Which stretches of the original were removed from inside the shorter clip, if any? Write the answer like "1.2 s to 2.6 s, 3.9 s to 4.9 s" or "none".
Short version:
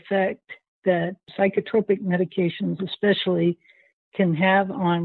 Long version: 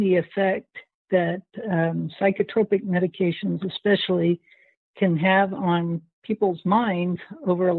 1.5 s to 2.1 s